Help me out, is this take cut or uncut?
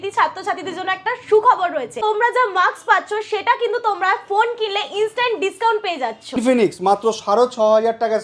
cut